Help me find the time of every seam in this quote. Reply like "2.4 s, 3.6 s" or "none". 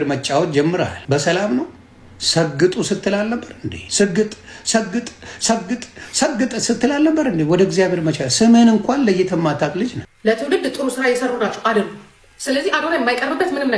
10.0 s